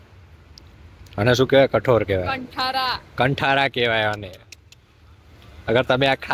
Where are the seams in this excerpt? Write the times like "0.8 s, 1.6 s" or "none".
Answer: 3.0 s